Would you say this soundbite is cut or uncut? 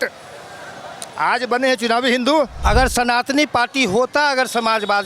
cut